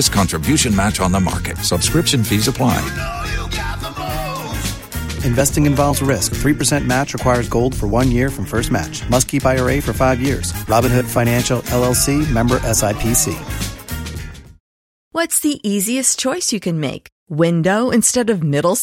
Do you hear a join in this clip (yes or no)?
yes